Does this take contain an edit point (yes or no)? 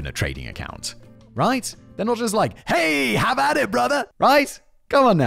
yes